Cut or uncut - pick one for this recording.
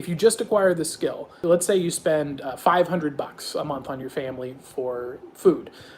cut